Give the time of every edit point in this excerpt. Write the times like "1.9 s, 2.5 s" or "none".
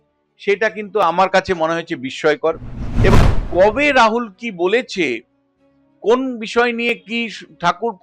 3.1 s